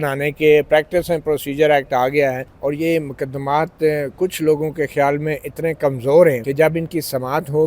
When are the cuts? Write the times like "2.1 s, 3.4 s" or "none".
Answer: 2.5 s, 6.4 s